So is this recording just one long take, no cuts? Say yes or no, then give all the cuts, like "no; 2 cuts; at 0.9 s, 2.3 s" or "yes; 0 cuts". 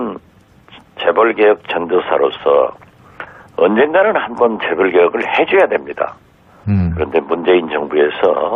yes; 0 cuts